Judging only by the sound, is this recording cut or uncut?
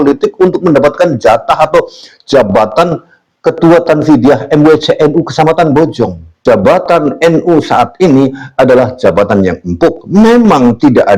cut